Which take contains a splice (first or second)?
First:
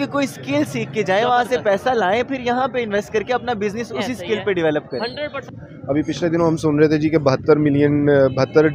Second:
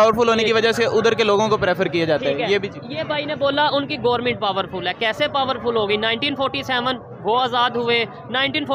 first